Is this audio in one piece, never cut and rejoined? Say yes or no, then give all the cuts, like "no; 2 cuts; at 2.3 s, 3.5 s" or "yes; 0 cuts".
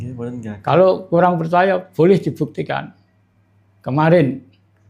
yes; 0 cuts